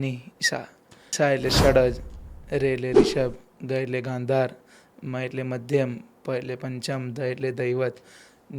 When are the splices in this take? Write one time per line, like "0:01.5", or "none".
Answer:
0:01.1